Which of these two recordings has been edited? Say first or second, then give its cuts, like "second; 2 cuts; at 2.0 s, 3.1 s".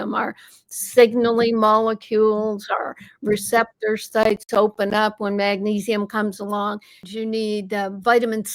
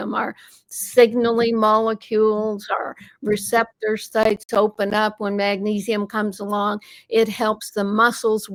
first; 1 cut; at 7.0 s